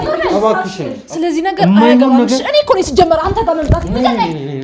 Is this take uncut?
no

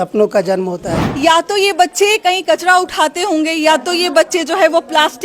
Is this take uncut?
no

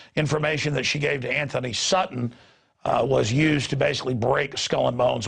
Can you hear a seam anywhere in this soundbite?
yes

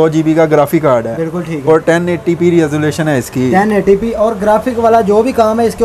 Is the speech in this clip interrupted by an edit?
no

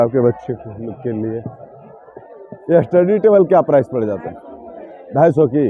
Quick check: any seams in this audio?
no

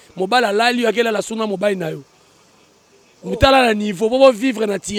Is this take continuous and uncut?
yes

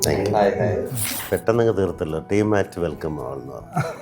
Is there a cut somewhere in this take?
yes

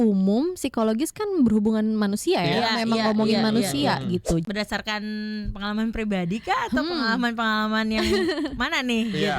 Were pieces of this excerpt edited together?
yes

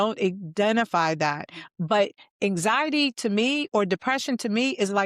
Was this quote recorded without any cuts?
yes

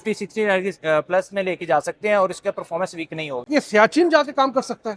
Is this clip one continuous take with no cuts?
no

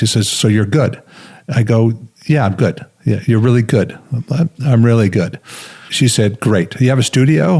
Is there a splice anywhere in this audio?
yes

